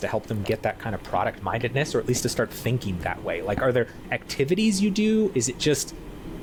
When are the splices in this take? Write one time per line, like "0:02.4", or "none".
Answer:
none

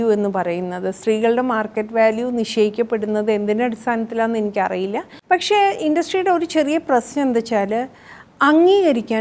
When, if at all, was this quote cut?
0:05.1

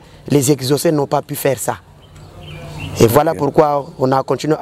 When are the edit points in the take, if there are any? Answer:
none

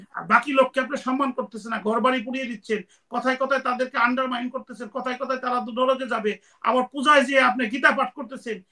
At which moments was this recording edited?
none

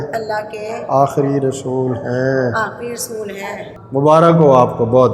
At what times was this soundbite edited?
0:03.7

